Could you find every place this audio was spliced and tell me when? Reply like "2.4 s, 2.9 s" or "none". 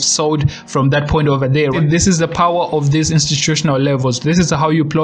1.8 s